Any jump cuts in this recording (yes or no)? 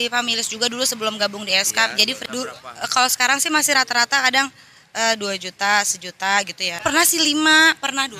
yes